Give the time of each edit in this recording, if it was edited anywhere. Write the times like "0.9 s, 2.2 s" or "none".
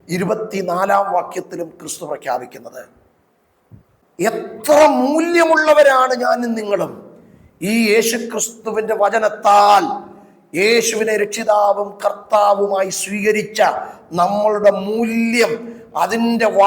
4.0 s